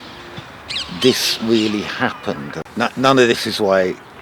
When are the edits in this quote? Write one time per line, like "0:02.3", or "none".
0:02.6